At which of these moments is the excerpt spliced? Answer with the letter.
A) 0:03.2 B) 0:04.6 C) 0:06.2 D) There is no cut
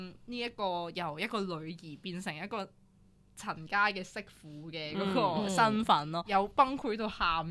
C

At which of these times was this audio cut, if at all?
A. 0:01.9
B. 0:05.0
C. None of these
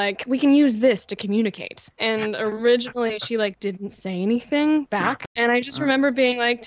C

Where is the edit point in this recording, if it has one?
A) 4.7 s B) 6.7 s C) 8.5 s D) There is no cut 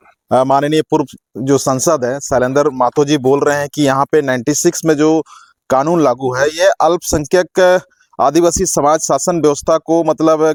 D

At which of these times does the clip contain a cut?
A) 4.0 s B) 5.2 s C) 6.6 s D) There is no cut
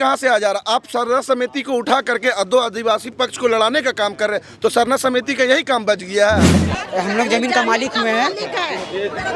C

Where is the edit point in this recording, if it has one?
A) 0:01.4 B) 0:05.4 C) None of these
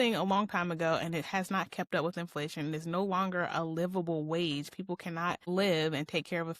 B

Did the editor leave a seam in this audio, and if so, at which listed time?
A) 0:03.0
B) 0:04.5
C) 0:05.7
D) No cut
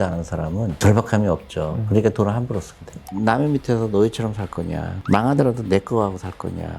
A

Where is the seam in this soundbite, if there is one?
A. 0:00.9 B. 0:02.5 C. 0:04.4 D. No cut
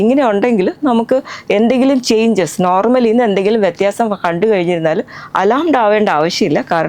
D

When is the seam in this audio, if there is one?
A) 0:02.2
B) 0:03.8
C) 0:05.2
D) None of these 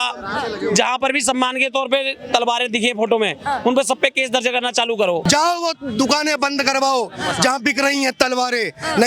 C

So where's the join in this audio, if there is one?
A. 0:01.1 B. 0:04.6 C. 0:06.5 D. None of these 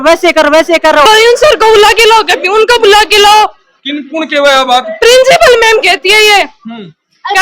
A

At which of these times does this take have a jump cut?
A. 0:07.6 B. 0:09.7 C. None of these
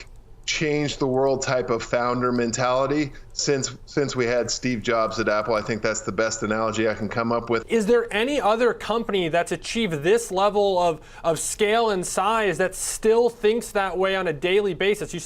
A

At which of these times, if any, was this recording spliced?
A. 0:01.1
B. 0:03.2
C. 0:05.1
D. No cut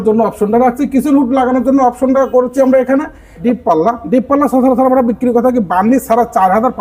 B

